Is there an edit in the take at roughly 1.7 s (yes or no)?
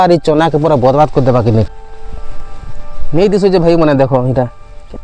yes